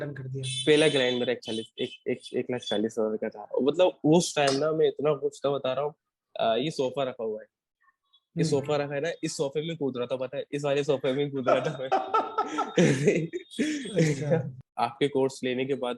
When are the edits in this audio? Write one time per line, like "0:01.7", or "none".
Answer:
0:14.5